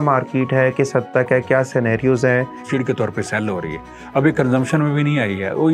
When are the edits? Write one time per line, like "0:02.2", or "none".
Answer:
0:02.6